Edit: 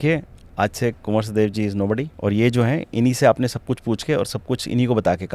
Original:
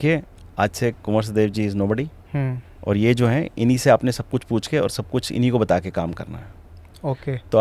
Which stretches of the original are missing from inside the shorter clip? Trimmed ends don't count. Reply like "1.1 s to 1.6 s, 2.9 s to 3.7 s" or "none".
2.1 s to 2.7 s

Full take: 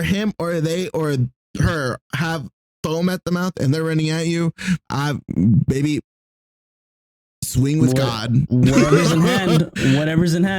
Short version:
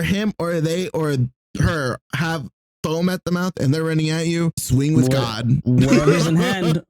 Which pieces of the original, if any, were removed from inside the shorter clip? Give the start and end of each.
4.6 s to 7.4 s

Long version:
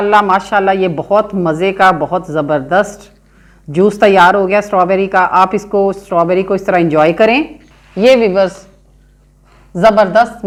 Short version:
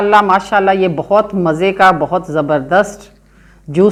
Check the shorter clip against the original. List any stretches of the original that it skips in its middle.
none

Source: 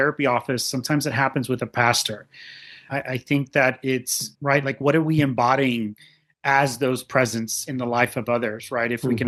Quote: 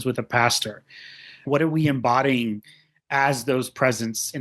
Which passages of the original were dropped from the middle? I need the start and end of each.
2.8 s to 4.7 s

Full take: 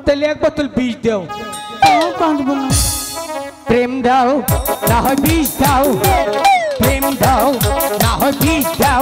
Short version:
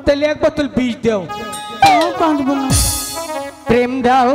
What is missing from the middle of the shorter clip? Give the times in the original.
none

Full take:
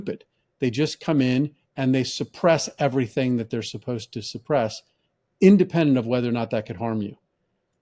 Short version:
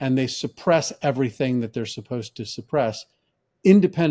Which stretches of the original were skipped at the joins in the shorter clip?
none

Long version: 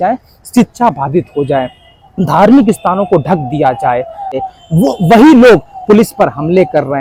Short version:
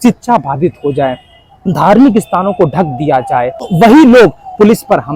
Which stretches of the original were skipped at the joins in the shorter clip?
4.2 s to 5.0 s

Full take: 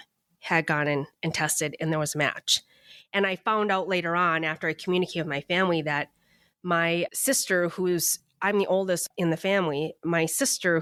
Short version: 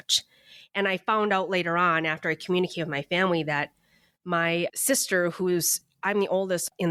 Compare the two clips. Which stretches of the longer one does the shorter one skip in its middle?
none

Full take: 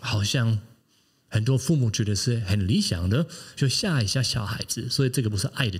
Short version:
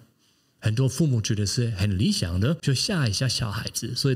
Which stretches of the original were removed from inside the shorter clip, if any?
3.3 s to 3.5 s

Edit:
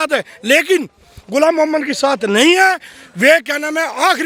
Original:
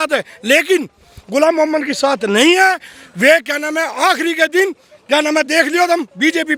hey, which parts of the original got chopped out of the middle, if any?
none

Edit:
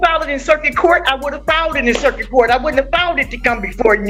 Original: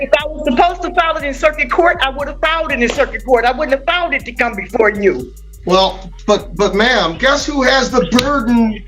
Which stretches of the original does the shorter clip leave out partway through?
none

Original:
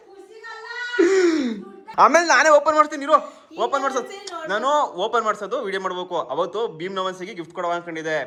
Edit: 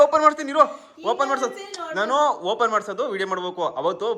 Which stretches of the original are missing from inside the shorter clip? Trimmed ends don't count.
none

